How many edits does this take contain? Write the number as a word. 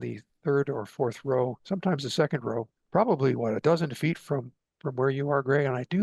one